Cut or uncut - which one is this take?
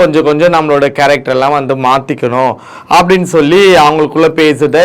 uncut